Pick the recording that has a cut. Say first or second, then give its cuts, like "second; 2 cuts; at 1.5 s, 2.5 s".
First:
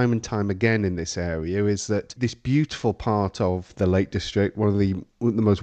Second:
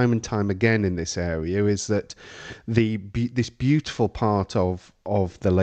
first; 2 cuts; at 2.2 s, 3.7 s